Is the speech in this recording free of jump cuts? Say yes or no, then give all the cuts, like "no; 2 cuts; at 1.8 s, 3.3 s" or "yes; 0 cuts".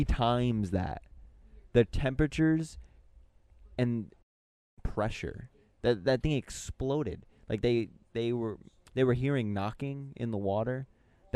yes; 0 cuts